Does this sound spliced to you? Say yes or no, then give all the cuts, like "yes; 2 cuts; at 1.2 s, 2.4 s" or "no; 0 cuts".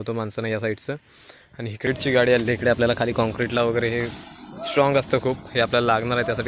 yes; 1 cut; at 1.9 s